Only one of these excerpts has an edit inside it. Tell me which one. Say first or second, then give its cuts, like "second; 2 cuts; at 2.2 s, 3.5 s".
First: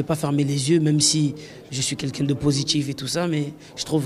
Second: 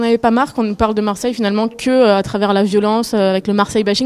first; 1 cut; at 1.1 s